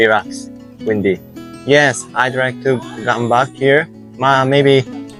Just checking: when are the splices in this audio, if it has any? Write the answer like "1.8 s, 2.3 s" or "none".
none